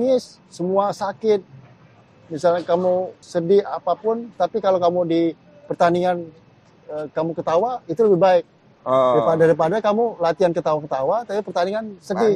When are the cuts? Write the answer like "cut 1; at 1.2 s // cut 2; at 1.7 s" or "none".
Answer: none